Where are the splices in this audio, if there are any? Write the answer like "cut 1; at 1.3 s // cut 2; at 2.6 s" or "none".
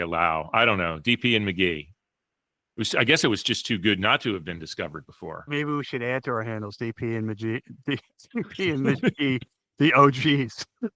cut 1; at 5.5 s

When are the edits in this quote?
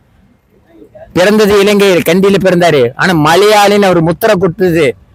none

